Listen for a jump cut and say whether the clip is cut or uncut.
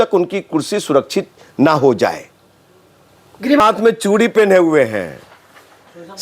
cut